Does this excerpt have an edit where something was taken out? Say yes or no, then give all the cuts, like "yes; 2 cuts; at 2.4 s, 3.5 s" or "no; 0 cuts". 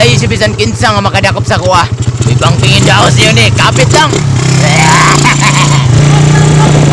yes; 1 cut; at 5.9 s